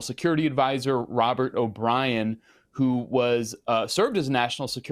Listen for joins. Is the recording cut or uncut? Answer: uncut